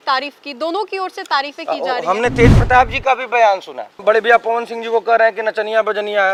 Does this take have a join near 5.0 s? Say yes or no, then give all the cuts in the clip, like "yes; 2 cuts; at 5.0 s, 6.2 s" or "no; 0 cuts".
no; 0 cuts